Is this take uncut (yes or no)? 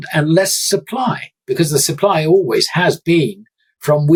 yes